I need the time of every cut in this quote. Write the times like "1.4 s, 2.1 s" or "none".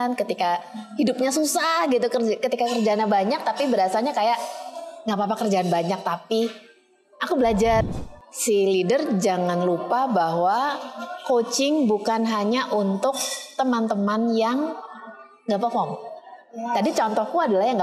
7.8 s